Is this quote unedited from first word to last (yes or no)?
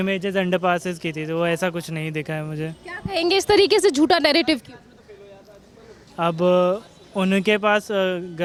yes